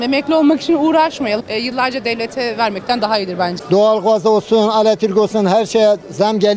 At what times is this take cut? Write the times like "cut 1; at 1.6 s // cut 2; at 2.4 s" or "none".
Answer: cut 1; at 1.4 s // cut 2; at 3.6 s